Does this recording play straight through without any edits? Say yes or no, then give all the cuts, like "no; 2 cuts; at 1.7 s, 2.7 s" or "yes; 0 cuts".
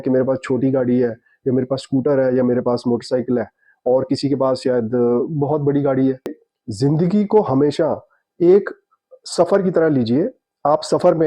no; 1 cut; at 6.4 s